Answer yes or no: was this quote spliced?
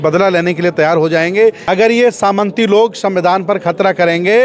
yes